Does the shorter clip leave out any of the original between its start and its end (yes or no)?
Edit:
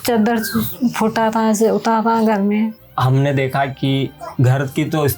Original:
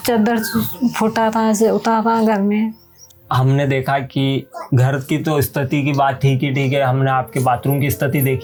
yes